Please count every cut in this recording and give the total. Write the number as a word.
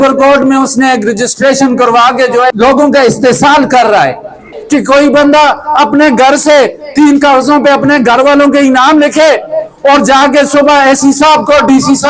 two